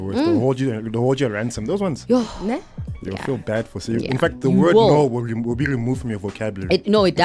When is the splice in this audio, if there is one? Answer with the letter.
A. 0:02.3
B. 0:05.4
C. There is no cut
C